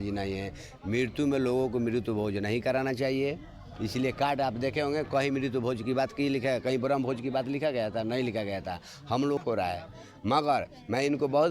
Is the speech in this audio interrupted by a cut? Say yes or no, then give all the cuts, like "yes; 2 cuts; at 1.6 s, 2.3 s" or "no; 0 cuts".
yes; 1 cut; at 9.4 s